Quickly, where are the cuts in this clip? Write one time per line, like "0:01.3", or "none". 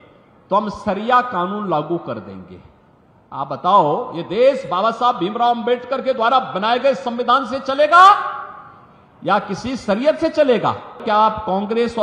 0:11.0